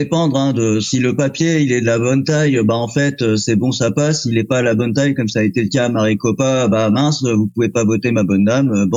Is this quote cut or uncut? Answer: uncut